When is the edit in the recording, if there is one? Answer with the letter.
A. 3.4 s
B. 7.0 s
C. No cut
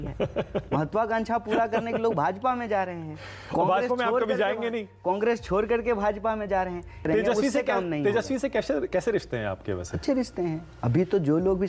B